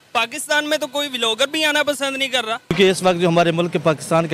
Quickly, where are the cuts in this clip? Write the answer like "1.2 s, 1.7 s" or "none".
2.7 s

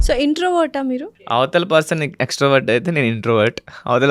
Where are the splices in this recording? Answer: 1.1 s

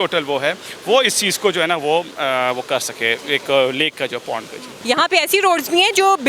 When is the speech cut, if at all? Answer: 4.7 s

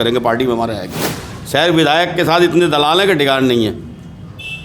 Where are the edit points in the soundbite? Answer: 1.3 s

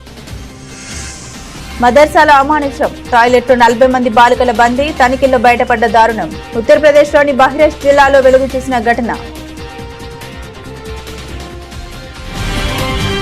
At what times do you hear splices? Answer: none

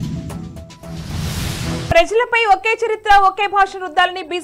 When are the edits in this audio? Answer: none

